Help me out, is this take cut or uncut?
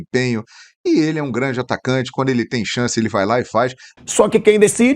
cut